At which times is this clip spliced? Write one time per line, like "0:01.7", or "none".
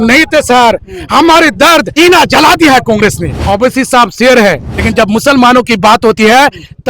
0:01.9
0:03.3
0:04.7